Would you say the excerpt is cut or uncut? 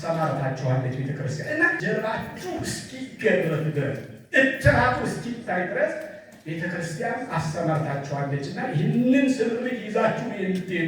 cut